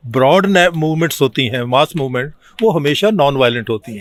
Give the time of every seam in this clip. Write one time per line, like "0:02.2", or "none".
none

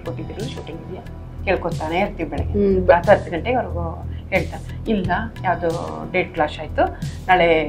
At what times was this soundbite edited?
none

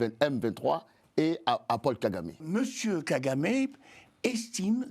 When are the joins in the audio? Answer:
0:02.4

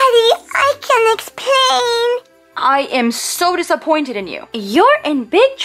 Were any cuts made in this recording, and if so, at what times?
0:02.4

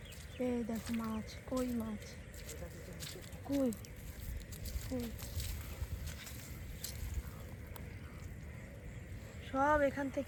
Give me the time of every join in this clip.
none

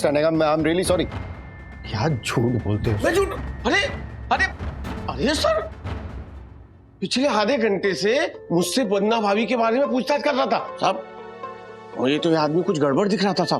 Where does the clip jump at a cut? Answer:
0:10.7

